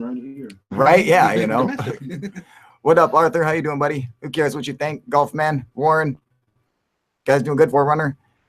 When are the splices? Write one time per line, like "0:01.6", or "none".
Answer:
0:02.8